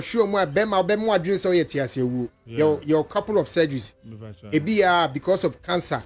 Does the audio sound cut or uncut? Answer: cut